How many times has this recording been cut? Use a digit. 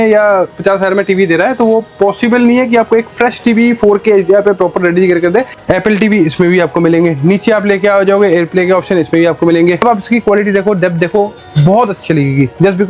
2